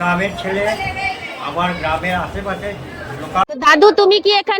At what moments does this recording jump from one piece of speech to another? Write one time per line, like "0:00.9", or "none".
0:03.4